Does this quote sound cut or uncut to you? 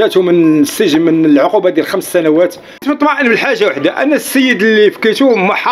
cut